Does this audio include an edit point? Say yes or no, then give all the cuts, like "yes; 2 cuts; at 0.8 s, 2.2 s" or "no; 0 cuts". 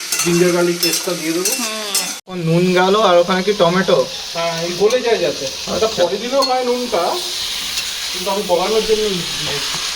yes; 1 cut; at 2.1 s